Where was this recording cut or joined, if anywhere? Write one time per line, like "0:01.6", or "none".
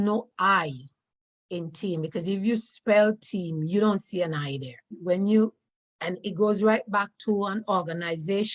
0:05.0